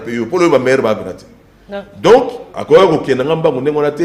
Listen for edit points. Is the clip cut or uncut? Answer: uncut